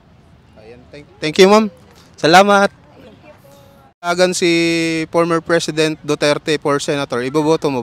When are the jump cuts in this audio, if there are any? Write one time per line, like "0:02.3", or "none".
0:04.1

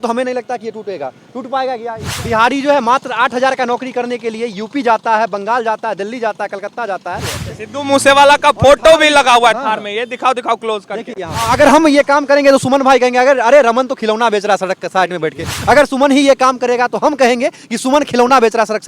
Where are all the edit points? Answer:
0:02.1
0:07.5
0:11.5

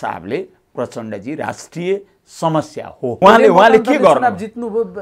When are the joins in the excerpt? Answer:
0:03.2

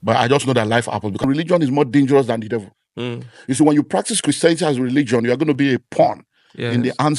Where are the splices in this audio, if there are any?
0:01.2

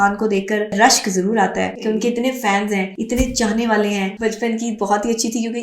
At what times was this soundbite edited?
0:00.7
0:01.8
0:03.0
0:04.1

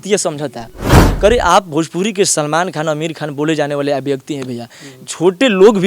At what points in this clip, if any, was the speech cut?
0:01.0

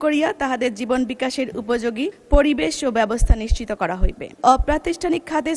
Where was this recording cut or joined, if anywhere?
0:02.2
0:04.4

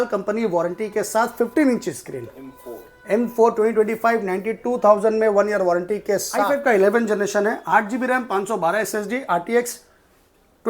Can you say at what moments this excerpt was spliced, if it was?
0:06.4

